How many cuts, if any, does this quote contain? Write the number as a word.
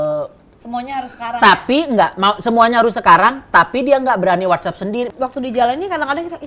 one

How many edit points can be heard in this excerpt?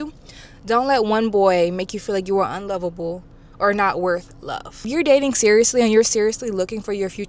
one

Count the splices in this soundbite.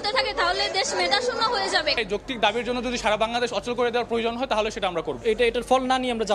two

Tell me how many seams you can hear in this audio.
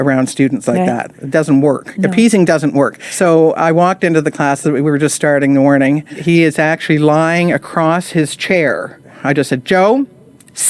three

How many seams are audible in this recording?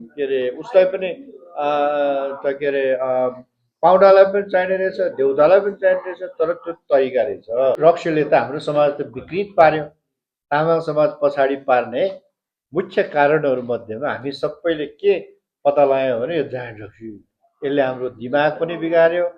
one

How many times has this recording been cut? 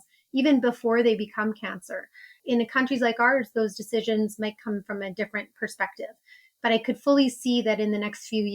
one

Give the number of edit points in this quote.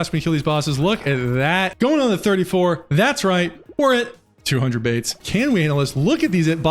two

